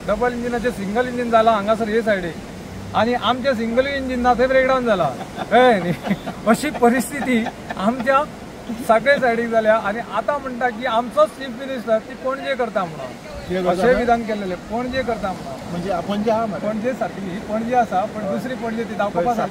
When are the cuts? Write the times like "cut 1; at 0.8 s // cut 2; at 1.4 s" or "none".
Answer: none

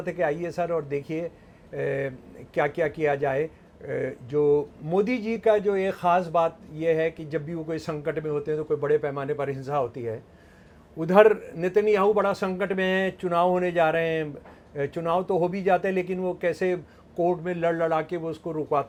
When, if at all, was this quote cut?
none

